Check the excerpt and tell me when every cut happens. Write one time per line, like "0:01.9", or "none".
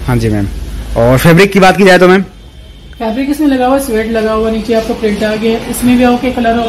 none